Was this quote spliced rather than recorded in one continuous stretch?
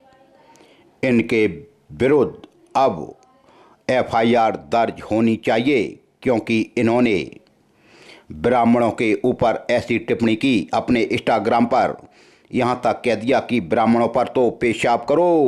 no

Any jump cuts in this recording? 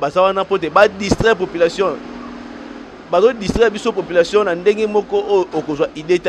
no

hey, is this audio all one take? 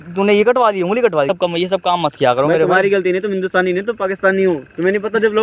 no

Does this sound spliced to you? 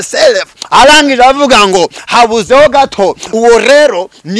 yes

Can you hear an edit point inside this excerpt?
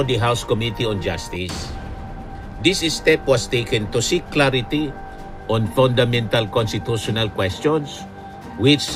no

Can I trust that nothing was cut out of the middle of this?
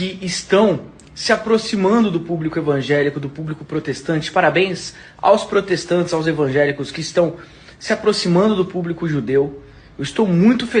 yes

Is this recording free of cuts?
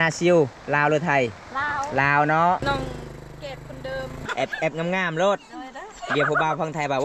no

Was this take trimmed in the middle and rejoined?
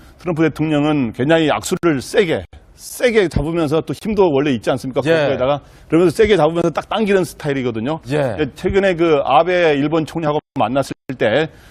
yes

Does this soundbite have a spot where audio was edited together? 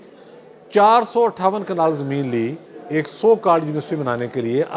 no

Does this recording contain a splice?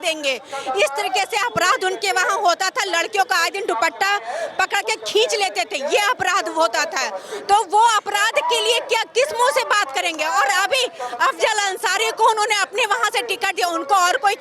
no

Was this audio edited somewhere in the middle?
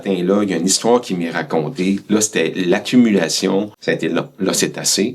yes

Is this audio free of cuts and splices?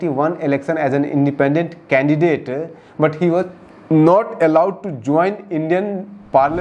yes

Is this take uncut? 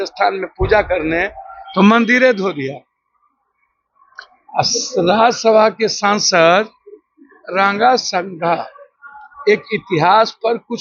yes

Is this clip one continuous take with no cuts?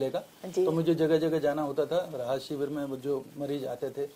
yes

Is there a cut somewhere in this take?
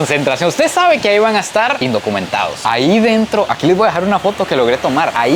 yes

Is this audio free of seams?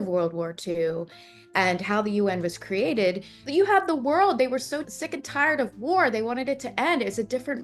yes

